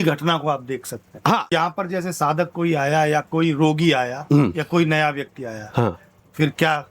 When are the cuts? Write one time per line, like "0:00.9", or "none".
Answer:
0:01.5